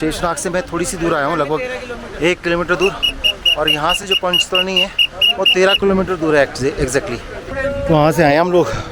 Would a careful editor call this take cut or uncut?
cut